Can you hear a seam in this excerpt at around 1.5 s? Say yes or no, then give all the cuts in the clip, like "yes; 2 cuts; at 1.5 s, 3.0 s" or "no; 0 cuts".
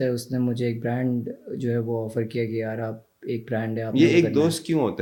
no; 0 cuts